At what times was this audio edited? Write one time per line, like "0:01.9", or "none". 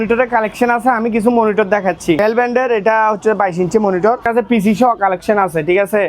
0:02.2
0:04.2